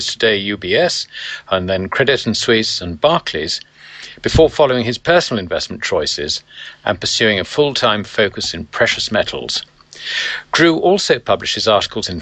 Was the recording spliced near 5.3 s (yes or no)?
no